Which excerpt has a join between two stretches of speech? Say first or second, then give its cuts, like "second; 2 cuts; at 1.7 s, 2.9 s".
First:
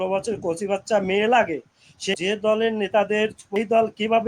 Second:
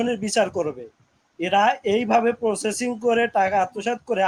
first; 2 cuts; at 1.9 s, 3.4 s